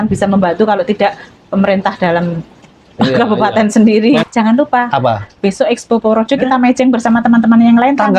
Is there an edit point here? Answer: yes; 1 cut; at 4.2 s

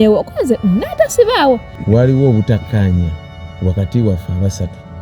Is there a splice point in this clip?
yes; 1 cut; at 1.7 s

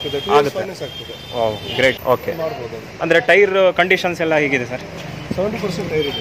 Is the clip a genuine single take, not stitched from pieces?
no; 1 cut; at 2.0 s

